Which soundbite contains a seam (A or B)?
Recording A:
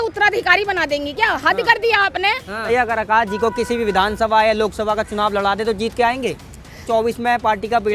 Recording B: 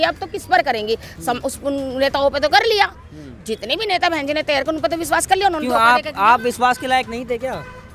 A